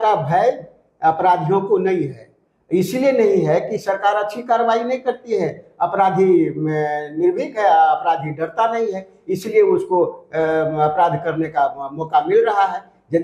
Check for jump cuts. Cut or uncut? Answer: uncut